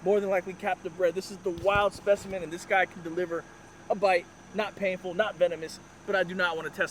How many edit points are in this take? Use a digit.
0